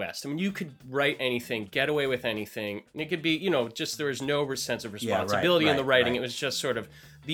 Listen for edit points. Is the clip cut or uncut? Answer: cut